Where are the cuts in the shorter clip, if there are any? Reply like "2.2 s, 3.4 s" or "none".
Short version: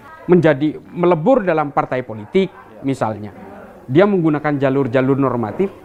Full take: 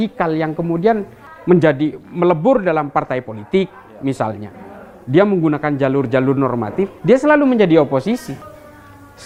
none

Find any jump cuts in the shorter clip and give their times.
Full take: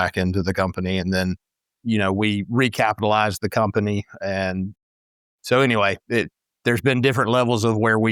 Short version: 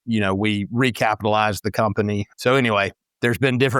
2.3 s, 3.0 s

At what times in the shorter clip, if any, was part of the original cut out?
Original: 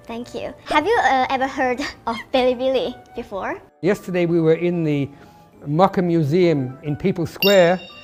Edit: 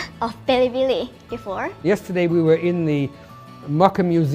1.7 s

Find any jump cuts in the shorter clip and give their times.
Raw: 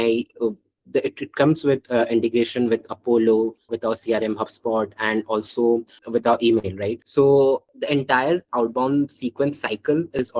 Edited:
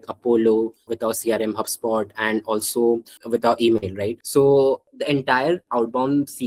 none

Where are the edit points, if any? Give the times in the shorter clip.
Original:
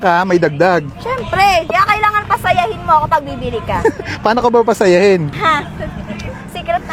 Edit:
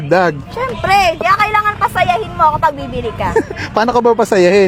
none

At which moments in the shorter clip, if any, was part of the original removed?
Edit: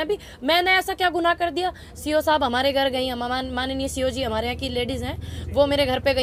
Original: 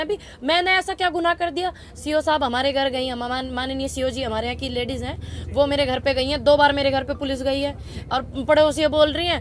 none

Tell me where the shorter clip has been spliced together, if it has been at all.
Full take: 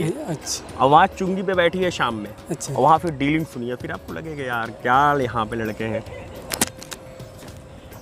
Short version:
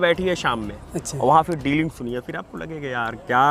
none

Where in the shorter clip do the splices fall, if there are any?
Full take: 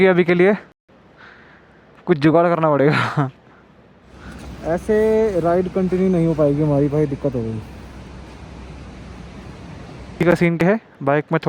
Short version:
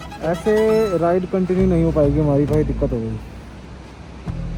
none

